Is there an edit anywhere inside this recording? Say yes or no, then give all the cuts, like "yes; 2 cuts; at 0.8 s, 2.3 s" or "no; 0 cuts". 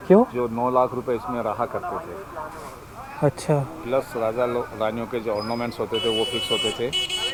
no; 0 cuts